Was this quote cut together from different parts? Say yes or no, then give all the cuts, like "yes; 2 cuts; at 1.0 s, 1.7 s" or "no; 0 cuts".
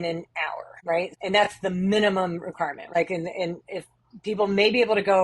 yes; 2 cuts; at 1.1 s, 2.9 s